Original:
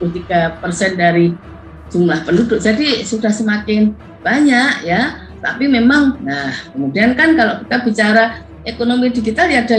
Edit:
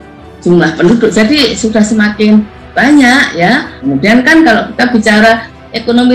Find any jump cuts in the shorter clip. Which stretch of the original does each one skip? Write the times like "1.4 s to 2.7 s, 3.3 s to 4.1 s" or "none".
5.2 s to 6.7 s